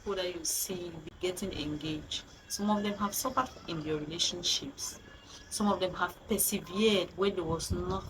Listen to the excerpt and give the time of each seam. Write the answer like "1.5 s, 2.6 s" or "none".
1.1 s